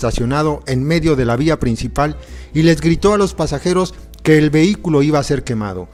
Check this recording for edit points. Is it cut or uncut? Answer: uncut